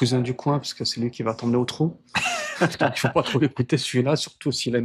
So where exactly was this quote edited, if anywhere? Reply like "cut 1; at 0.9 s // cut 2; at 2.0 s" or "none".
none

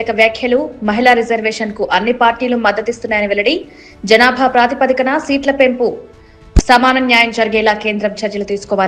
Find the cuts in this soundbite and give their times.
none

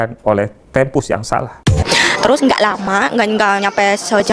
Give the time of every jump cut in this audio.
cut 1; at 1.9 s

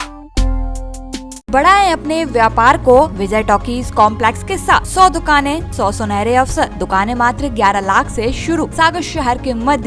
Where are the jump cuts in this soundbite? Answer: cut 1; at 1.5 s // cut 2; at 3.2 s // cut 3; at 4.9 s // cut 4; at 5.7 s // cut 5; at 6.8 s // cut 6; at 8.7 s

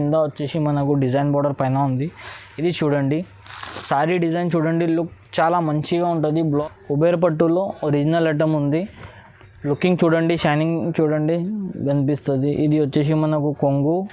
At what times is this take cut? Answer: cut 1; at 6.6 s

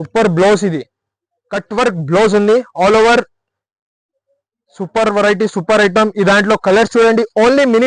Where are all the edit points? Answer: none

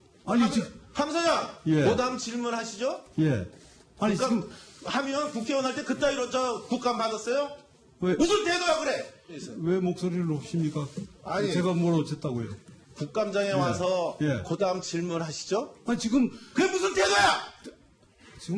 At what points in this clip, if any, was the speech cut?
cut 1; at 12.0 s

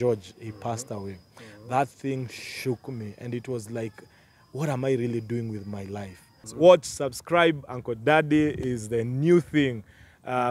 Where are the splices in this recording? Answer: cut 1; at 6.4 s

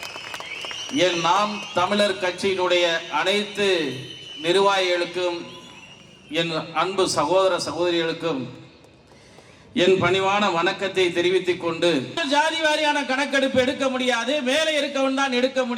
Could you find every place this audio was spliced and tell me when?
cut 1; at 12.2 s

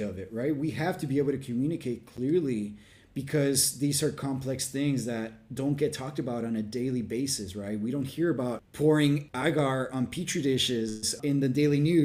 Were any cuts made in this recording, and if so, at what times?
cut 1; at 8.7 s // cut 2; at 9.3 s // cut 3; at 11.1 s

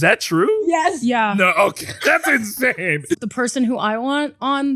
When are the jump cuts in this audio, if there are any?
cut 1; at 3.2 s

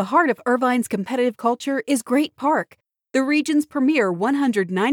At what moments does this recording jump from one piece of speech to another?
none

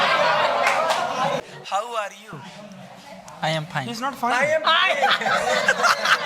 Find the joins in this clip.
cut 1; at 1.4 s

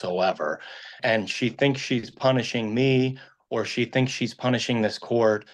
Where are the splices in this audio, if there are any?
cut 1; at 1.0 s

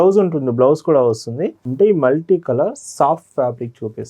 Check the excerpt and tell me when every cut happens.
cut 1; at 1.6 s

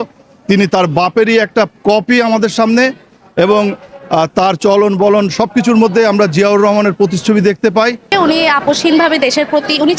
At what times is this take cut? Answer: cut 1; at 8.1 s

